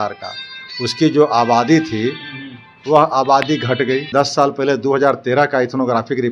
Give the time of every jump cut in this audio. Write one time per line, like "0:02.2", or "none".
0:04.1